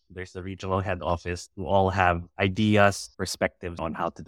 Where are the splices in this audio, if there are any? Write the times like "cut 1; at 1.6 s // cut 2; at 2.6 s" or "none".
cut 1; at 1.0 s // cut 2; at 2.3 s // cut 3; at 3.4 s